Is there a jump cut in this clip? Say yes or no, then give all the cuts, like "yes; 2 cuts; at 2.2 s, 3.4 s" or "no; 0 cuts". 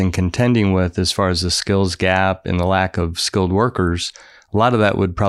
no; 0 cuts